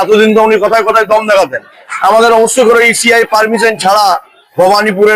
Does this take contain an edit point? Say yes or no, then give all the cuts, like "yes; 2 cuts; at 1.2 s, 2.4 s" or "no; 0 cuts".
yes; 1 cut; at 1.9 s